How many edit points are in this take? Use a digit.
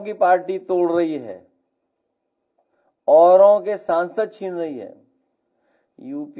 0